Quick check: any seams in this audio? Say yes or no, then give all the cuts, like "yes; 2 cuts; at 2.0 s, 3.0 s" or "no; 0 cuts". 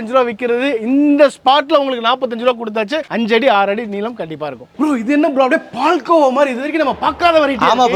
no; 0 cuts